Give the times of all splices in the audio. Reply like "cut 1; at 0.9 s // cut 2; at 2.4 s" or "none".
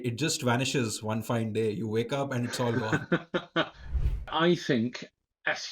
cut 1; at 4.0 s